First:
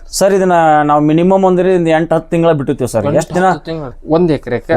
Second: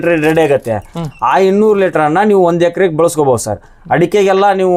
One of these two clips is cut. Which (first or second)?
first